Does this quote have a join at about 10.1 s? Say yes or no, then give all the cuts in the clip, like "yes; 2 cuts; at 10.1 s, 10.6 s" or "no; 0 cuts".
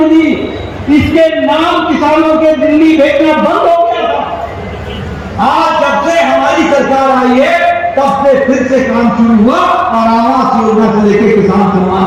no; 0 cuts